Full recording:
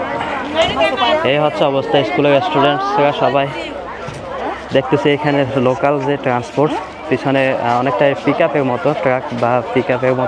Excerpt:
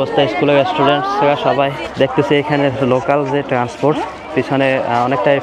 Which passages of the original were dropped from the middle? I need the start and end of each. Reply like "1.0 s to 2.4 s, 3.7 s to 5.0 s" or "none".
3.6 s to 4.6 s